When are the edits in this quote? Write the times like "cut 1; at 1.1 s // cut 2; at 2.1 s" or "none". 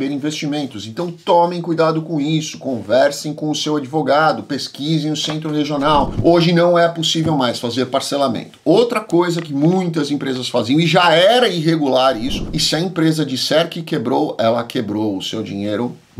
cut 1; at 6.1 s // cut 2; at 12.4 s